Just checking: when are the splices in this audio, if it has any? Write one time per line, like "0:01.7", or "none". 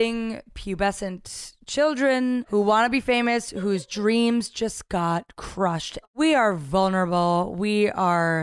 0:02.4
0:06.0